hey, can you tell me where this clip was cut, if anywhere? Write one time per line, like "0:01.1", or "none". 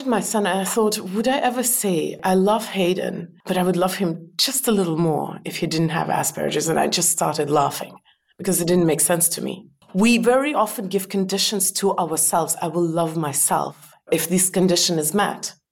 0:02.2
0:03.3
0:09.8
0:14.1

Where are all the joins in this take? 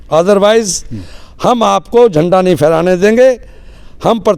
none

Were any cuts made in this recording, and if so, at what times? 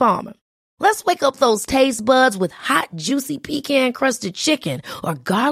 none

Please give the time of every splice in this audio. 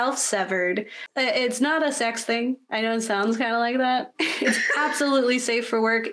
0:01.0

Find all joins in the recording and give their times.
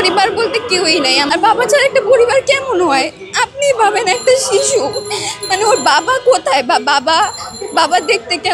0:01.3

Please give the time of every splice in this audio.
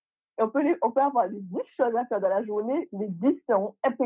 none

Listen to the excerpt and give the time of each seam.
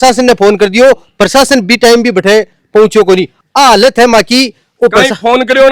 none

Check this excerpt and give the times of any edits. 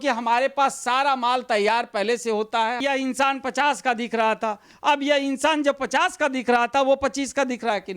0:02.8

